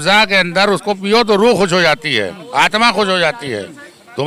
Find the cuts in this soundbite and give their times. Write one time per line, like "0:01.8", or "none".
none